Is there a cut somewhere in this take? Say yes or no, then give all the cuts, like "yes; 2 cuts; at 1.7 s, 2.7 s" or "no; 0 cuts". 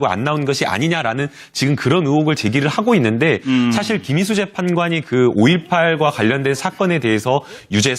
yes; 1 cut; at 3.8 s